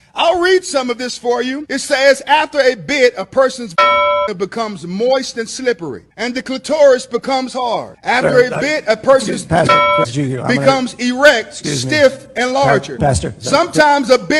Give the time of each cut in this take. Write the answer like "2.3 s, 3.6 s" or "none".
none